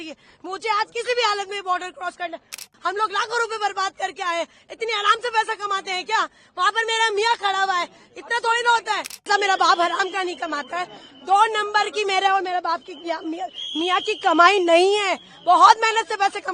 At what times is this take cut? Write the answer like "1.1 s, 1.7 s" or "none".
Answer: 2.6 s, 9.3 s